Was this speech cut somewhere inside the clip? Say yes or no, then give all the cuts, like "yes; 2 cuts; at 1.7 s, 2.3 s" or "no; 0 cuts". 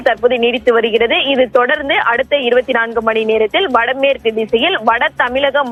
no; 0 cuts